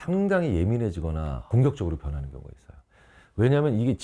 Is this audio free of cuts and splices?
yes; 0 cuts

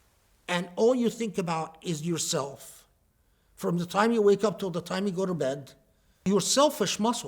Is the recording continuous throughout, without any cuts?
no; 1 cut; at 6.2 s

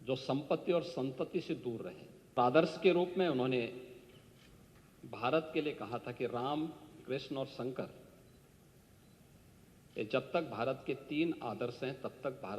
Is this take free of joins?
no; 1 cut; at 2.4 s

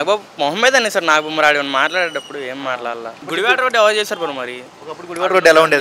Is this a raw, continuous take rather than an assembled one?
no; 1 cut; at 3.2 s

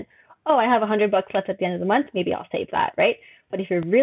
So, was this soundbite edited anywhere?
no; 0 cuts

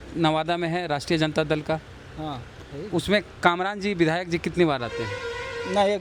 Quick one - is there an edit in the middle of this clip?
no; 0 cuts

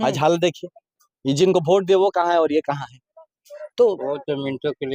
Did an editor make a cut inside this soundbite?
no; 0 cuts

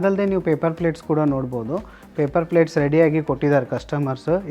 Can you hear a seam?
no; 0 cuts

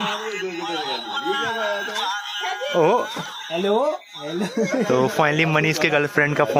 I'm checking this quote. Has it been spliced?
no; 0 cuts

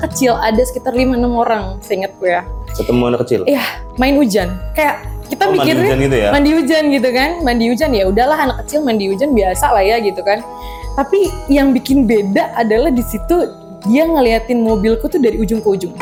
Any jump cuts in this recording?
no; 0 cuts

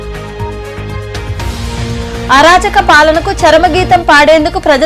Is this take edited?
yes; 1 cut; at 1.3 s

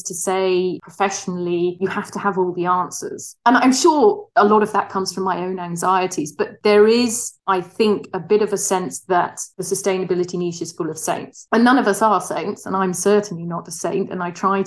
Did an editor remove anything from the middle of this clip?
no; 0 cuts

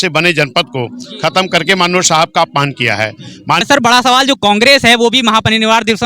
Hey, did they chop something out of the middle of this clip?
yes; 1 cut; at 3.6 s

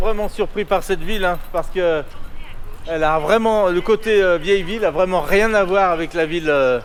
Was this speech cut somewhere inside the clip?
no; 0 cuts

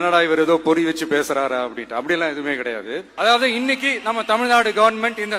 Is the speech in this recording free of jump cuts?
no; 1 cut; at 3.1 s

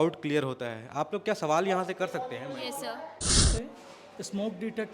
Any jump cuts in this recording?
yes; 1 cut; at 3.4 s

